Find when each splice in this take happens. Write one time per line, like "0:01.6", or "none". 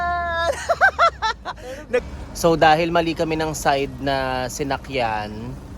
0:02.0

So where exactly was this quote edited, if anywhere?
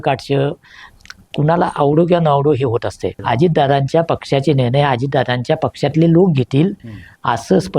0:03.2

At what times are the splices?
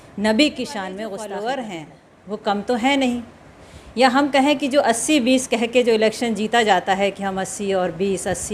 0:01.0

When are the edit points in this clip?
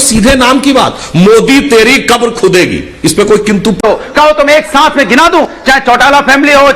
0:03.8

